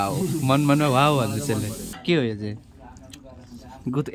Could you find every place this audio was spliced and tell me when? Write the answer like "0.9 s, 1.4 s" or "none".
1.9 s